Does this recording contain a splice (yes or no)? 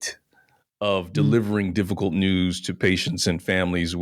no